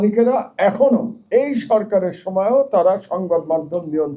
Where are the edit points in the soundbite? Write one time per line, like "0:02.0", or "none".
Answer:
0:01.2